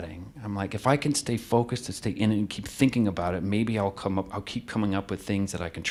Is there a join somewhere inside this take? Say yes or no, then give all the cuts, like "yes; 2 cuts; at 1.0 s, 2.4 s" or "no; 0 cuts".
no; 0 cuts